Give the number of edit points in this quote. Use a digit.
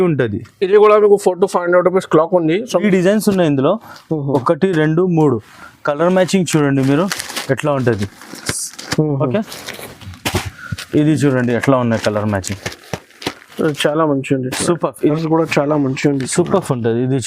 2